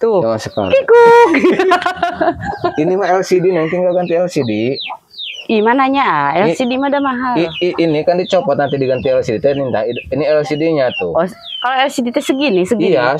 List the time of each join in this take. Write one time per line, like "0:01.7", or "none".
none